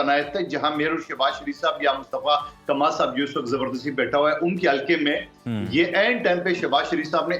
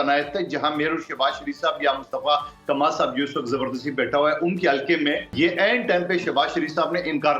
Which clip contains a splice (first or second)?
second